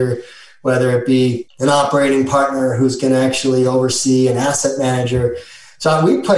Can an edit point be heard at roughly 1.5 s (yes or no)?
yes